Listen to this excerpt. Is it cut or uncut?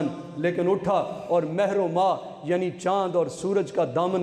uncut